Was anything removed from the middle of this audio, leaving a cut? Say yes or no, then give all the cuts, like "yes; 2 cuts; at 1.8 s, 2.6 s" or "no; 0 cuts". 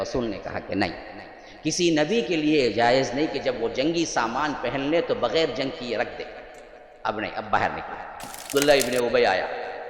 yes; 1 cut; at 8.5 s